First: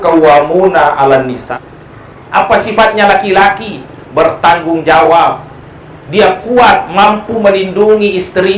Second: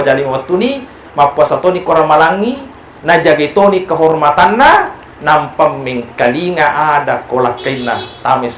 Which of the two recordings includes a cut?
first; 1 cut; at 1.4 s

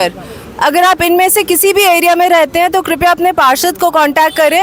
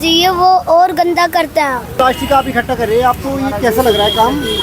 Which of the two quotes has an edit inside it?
second; 1 cut; at 1.8 s

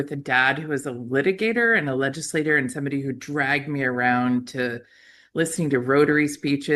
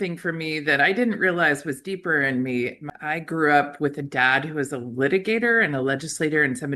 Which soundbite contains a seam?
second; 1 cut; at 2.9 s

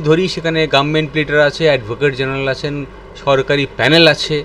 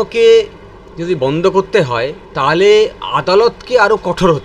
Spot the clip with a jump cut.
second; 1 cut; at 2.2 s

